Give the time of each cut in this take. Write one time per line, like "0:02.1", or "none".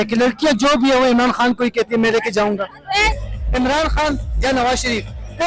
0:03.2